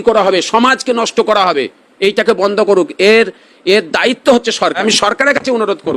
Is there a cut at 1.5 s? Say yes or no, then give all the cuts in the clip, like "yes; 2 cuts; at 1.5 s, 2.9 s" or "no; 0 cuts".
no; 1 cut; at 4.8 s